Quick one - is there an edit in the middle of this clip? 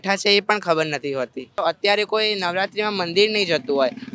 yes; 1 cut; at 1.6 s

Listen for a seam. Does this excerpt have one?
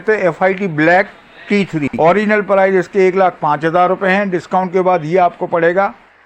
yes; 1 cut; at 1.9 s

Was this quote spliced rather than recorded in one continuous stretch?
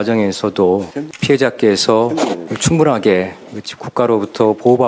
no; 0 cuts

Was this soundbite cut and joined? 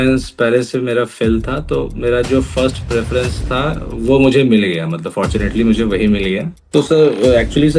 yes; 1 cut; at 6.5 s

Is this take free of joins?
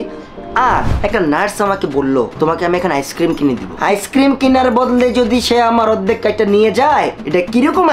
no; 1 cut; at 0.9 s

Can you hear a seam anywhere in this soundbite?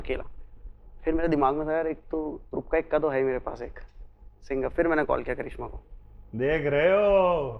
no; 0 cuts

